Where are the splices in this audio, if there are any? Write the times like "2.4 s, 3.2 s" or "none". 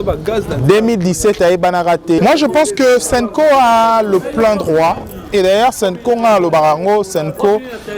2.2 s